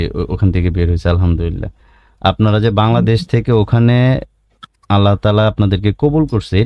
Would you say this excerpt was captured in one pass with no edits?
yes; 0 cuts

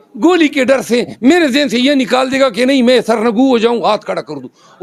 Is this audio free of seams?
yes; 0 cuts

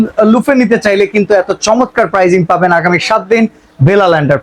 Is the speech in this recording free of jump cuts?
yes; 0 cuts

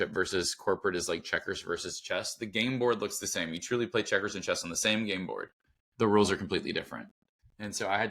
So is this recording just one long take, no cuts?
yes; 0 cuts

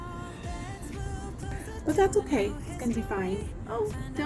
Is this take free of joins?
no; 1 cut; at 1.5 s

